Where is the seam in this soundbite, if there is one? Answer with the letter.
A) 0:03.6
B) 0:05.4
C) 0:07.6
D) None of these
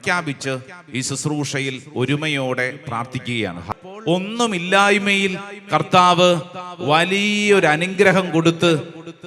A